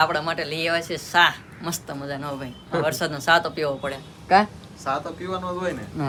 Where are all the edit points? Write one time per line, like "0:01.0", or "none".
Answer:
none